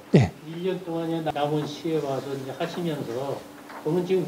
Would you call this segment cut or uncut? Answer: cut